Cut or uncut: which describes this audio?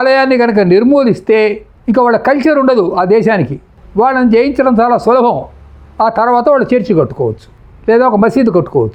uncut